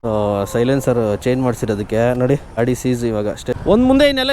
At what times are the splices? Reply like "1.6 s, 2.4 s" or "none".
2.6 s, 3.6 s